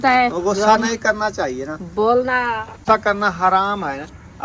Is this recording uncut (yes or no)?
no